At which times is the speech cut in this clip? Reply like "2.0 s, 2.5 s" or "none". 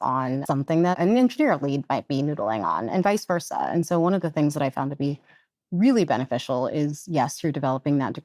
0.9 s